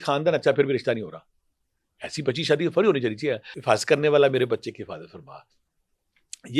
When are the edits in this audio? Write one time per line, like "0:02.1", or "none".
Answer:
0:03.5